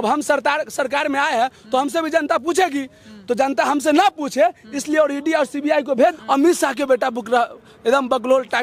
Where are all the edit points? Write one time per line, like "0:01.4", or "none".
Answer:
0:06.1